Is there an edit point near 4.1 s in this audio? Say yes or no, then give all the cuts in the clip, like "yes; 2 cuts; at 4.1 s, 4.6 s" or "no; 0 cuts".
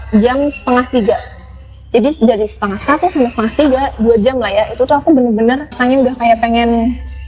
no; 1 cut; at 5.8 s